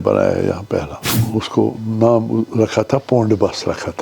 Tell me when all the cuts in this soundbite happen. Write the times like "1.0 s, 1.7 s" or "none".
1.2 s